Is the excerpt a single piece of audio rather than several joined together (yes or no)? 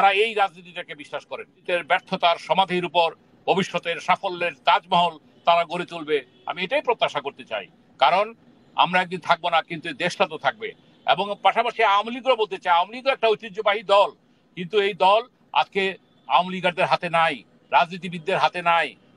no